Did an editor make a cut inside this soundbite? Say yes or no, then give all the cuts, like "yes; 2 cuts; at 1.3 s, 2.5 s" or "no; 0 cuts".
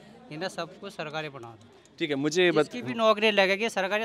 no; 0 cuts